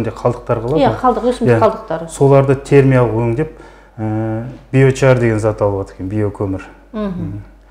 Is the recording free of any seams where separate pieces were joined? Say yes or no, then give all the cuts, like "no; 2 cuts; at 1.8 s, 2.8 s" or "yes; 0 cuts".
yes; 0 cuts